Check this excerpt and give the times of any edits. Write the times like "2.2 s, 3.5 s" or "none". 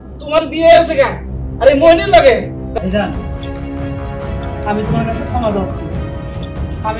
2.8 s

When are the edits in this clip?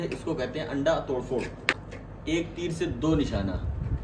1.8 s

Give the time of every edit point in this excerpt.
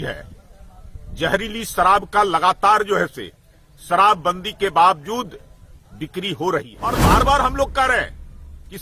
6.8 s

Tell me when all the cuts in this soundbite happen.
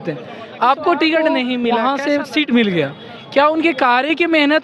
1.7 s

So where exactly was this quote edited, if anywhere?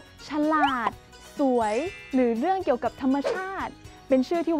none

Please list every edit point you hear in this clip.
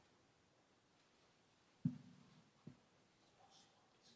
none

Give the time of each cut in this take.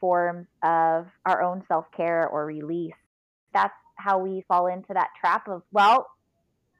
3.3 s, 4.4 s

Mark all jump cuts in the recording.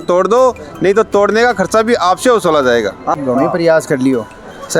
3.0 s

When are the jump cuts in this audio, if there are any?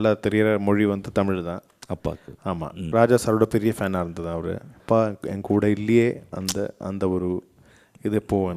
2.8 s, 4.8 s

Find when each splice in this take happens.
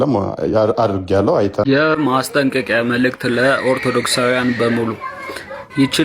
1.7 s

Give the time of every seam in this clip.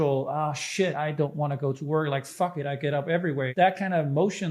0.9 s, 3.5 s

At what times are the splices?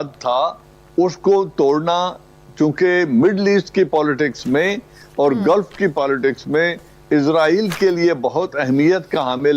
none

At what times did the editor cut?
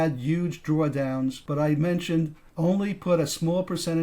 1.4 s

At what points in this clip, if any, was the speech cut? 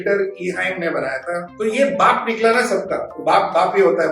1.5 s

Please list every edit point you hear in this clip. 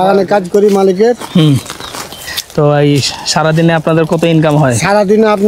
none

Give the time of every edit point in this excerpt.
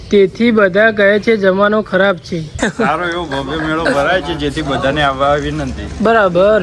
2.5 s

